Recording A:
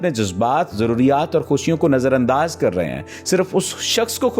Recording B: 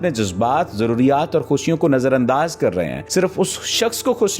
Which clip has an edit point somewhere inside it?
B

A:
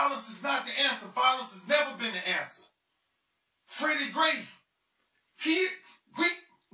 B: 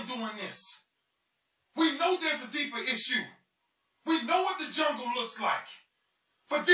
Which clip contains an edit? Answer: B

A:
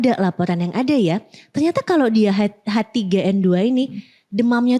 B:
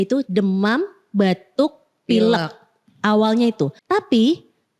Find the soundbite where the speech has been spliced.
B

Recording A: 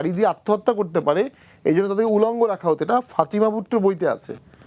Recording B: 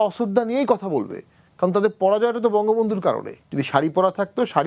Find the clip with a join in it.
B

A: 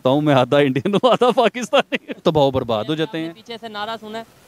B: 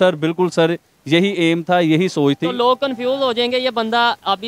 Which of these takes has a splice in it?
A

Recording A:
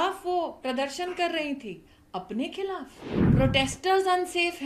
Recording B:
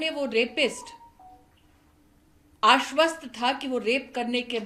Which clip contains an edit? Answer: A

